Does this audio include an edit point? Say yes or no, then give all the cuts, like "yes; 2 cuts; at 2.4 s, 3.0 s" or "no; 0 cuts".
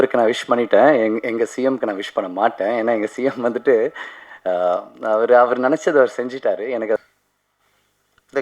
yes; 1 cut; at 7.0 s